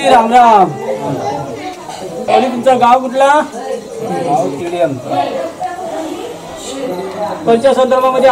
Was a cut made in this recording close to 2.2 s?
yes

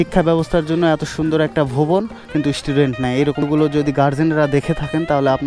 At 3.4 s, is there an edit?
yes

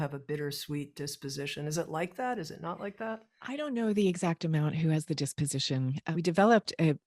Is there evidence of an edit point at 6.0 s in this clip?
yes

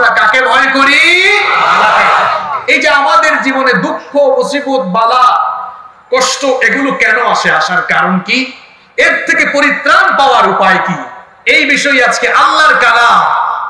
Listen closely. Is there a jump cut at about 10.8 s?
no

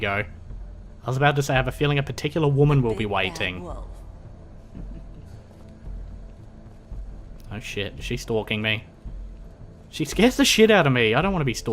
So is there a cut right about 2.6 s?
no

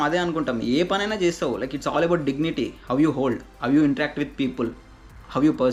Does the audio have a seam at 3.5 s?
no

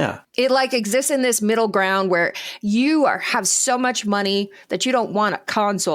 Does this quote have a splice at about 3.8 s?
no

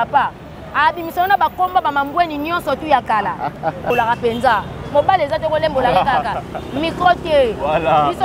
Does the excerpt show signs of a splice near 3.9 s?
yes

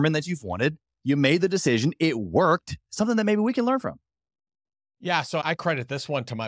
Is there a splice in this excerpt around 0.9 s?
no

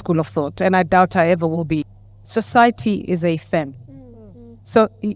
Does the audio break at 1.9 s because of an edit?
yes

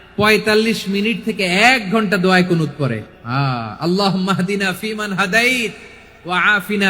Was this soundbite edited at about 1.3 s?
no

